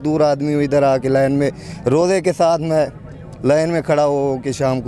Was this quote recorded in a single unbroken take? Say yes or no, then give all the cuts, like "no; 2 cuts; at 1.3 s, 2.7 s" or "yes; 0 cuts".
yes; 0 cuts